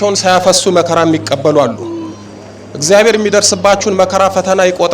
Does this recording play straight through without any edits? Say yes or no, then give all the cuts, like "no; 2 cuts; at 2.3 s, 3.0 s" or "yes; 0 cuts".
yes; 0 cuts